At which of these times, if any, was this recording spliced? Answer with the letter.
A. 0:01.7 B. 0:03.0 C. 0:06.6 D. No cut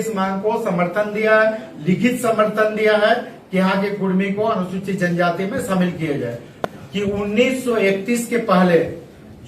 C